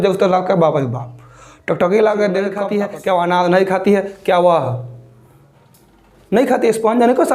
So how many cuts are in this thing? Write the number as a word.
one